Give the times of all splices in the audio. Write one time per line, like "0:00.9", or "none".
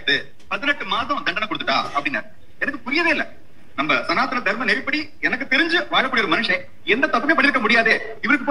none